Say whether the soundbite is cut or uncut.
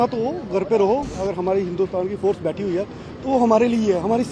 cut